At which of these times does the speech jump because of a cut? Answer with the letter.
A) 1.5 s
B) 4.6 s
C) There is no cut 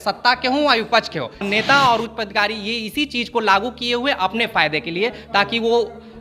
A